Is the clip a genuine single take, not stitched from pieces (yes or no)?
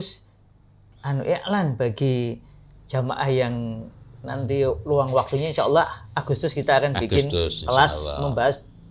yes